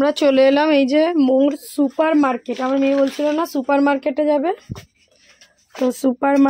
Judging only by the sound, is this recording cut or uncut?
uncut